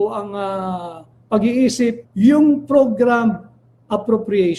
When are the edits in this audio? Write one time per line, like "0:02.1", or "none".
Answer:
0:02.0